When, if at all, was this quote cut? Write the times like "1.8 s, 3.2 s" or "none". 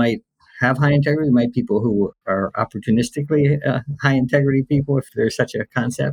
2.2 s, 5.1 s